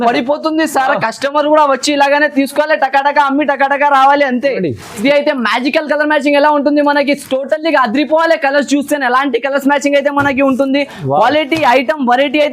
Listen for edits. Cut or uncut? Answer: cut